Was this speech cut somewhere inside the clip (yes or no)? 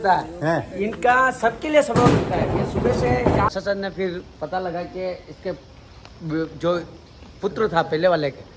yes